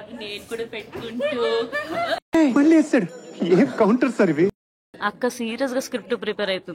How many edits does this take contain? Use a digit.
2